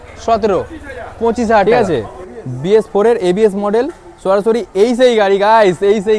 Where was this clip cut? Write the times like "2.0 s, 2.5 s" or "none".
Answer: 1.7 s